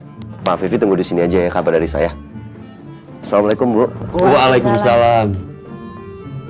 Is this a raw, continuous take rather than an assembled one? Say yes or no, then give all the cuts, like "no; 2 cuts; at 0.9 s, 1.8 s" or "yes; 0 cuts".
no; 1 cut; at 5.4 s